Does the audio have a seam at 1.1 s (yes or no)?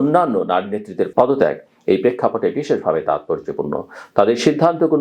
yes